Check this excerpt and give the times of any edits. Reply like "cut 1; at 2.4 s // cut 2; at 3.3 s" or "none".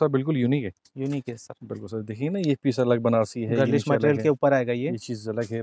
none